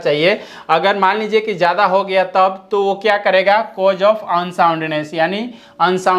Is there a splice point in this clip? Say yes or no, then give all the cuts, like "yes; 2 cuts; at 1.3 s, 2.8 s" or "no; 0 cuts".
no; 0 cuts